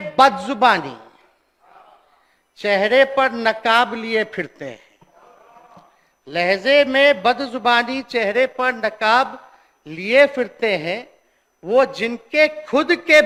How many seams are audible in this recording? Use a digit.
0